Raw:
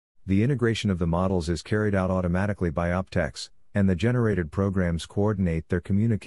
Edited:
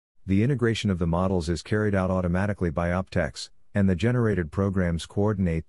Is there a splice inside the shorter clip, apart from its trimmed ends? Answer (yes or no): no